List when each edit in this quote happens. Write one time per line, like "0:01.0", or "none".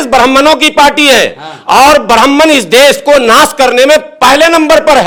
none